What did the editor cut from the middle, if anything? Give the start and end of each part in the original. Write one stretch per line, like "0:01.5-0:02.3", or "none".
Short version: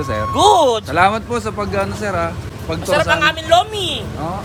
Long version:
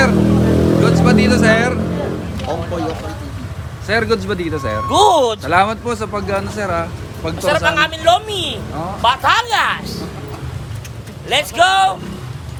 none